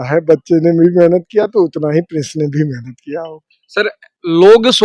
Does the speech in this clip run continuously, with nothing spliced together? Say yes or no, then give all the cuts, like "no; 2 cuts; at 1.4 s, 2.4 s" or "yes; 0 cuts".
yes; 0 cuts